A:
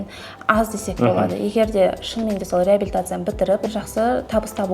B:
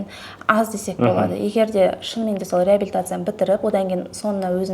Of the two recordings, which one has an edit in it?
A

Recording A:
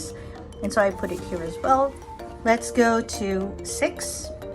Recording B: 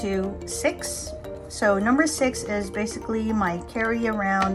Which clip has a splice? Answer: A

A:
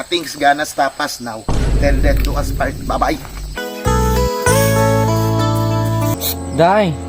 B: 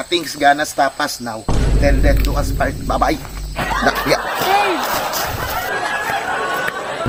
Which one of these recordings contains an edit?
A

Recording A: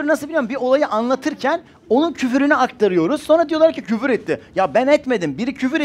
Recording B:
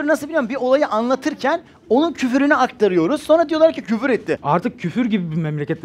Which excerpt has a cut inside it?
B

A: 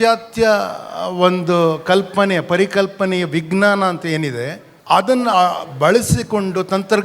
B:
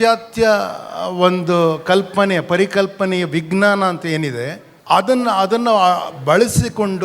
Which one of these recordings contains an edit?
A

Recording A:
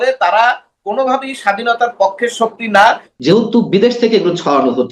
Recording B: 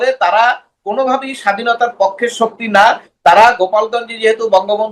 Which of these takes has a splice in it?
A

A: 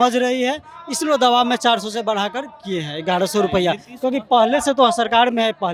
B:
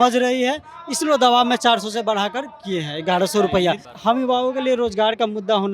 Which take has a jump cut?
B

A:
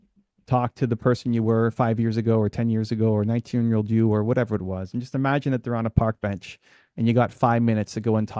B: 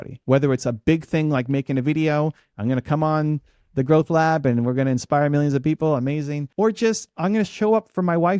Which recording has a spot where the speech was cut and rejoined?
B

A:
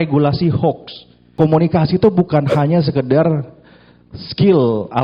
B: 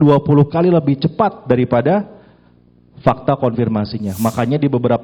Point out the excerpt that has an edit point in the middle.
A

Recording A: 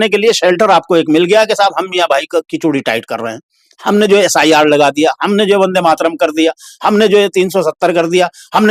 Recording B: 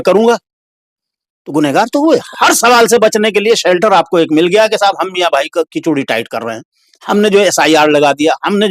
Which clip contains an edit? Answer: B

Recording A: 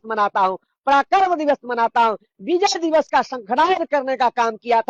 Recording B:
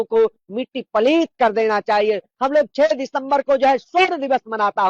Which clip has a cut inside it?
B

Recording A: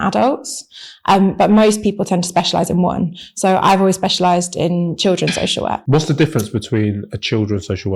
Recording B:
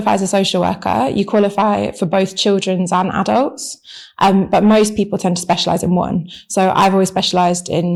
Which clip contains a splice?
A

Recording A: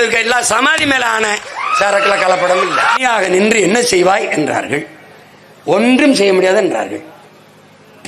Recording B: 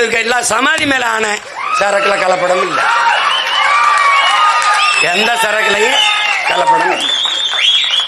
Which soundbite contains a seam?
A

